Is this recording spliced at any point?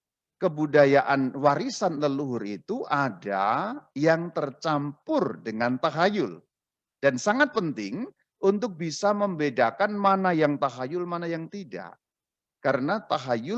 no; 0 cuts

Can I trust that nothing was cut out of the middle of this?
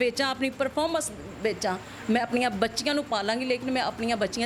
yes; 0 cuts

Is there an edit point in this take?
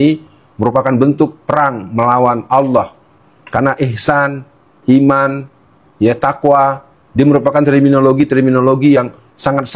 no; 0 cuts

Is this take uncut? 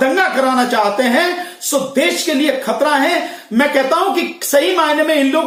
yes; 0 cuts

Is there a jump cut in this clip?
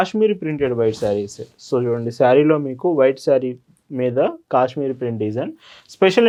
no; 0 cuts

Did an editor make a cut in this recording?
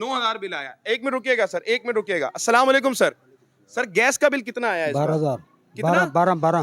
no; 0 cuts

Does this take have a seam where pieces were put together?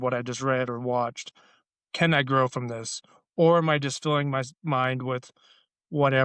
no; 0 cuts

